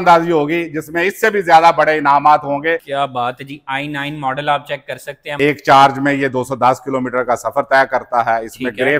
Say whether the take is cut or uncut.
cut